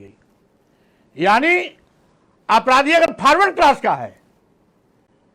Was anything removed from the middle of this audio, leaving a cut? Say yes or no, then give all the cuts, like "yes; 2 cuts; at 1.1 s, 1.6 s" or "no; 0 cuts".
no; 0 cuts